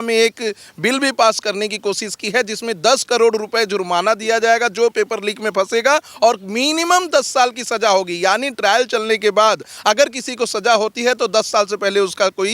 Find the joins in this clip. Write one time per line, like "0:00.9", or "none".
none